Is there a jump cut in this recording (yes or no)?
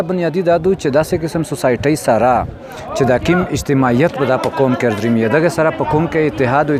no